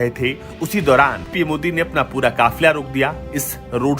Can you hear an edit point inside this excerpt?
yes; 1 cut; at 1.3 s

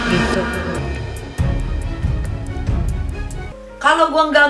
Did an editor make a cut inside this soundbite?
yes; 1 cut; at 3.4 s

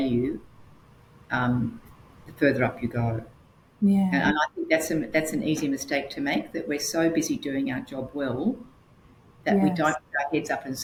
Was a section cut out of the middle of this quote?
no; 0 cuts

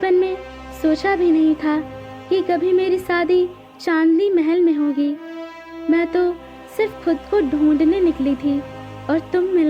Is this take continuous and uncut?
yes; 0 cuts

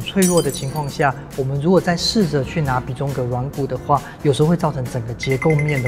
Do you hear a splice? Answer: no; 0 cuts

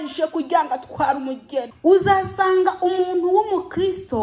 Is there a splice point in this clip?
yes; 1 cut; at 1.7 s

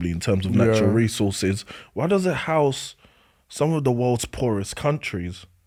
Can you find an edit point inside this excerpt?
no; 0 cuts

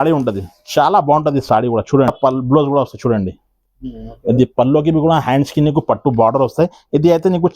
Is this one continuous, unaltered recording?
no; 1 cut; at 2.1 s

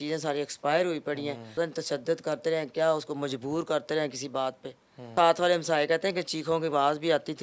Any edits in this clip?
yes; 2 cuts; at 1.5 s, 5.2 s

